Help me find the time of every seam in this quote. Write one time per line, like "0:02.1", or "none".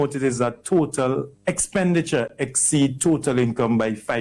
0:01.3